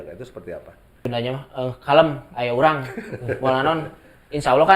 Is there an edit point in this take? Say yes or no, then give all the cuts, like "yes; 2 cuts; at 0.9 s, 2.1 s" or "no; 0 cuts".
yes; 1 cut; at 1.1 s